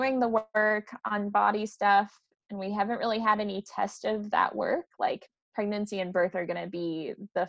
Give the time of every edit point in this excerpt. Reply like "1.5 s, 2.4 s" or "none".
none